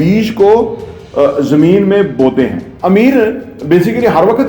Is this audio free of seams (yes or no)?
no